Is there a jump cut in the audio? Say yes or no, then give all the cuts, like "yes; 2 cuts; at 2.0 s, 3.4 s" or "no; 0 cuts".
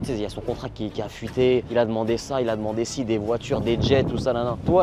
no; 0 cuts